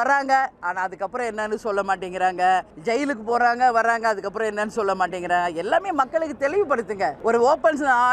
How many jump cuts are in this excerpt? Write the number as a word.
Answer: two